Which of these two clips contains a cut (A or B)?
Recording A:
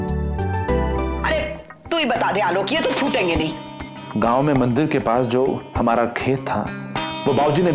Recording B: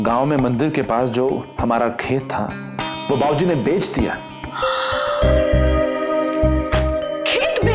A